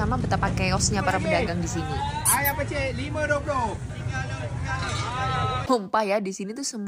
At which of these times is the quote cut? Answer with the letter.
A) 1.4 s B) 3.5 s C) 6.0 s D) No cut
C